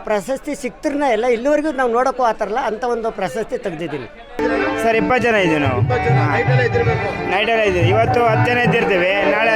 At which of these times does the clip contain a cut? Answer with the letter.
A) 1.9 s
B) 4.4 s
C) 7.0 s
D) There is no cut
B